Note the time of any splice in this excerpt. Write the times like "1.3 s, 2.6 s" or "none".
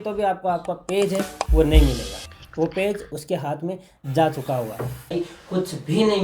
5.1 s

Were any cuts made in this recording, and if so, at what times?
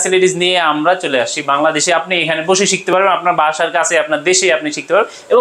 none

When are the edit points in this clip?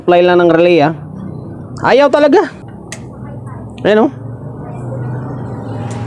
2.6 s

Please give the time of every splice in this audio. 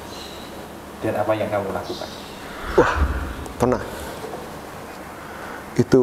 5.0 s

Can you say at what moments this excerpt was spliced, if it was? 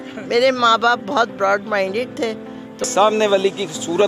2.8 s

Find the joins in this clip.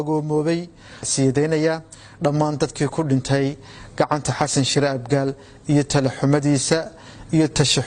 1.1 s

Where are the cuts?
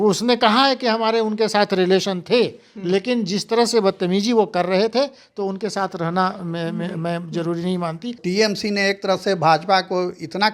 8.2 s

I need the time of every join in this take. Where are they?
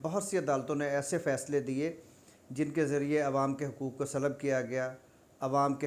none

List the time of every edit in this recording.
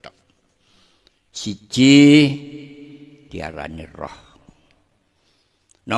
none

